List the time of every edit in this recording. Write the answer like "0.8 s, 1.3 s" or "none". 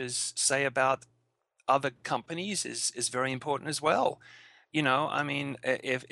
none